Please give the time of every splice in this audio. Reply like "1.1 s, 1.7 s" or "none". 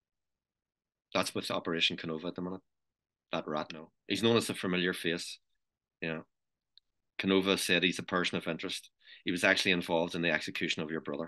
3.9 s